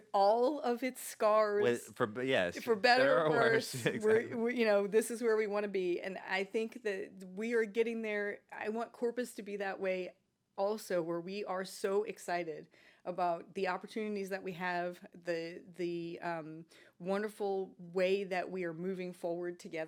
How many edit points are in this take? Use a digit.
0